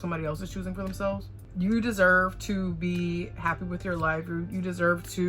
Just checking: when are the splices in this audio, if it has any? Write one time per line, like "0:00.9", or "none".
0:01.4